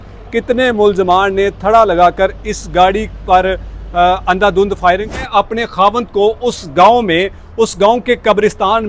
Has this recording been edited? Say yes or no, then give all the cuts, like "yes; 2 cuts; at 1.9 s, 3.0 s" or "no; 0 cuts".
yes; 1 cut; at 5.2 s